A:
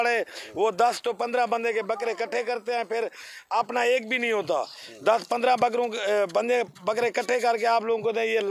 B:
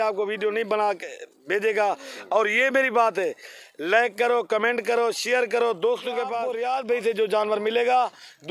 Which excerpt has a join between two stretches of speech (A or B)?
B